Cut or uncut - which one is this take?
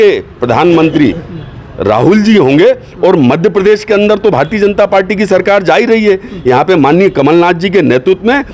uncut